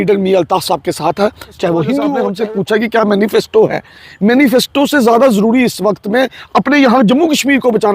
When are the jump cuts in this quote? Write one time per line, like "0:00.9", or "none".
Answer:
0:02.3